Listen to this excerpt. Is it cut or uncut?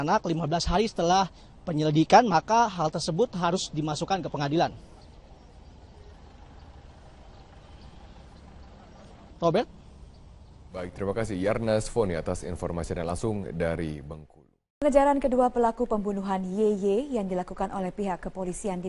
uncut